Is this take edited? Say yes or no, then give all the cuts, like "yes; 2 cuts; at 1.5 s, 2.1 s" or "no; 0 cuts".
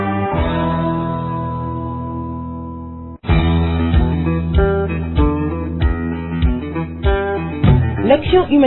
yes; 2 cuts; at 1.9 s, 3.1 s